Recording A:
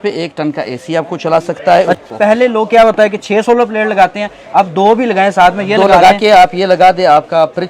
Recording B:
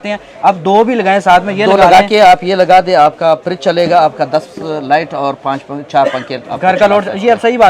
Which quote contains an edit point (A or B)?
A